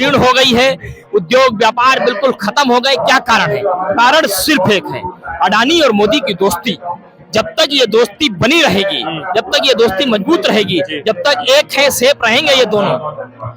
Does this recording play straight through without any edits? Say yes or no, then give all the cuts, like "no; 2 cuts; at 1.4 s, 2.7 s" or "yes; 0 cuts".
yes; 0 cuts